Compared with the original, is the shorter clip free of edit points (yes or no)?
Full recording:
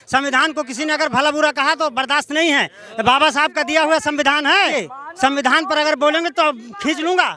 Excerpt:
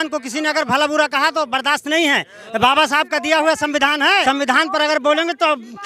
no